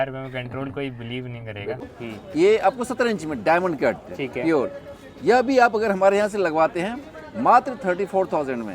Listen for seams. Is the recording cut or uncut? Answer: cut